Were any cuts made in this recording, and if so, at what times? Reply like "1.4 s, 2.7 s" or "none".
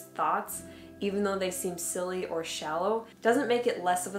3.2 s